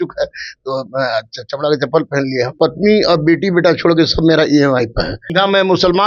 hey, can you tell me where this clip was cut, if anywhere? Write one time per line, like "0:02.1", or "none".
0:02.5
0:05.2